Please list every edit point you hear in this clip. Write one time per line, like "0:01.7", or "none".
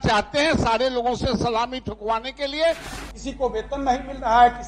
0:02.9